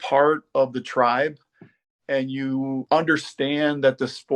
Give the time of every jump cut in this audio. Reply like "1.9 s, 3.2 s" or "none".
2.8 s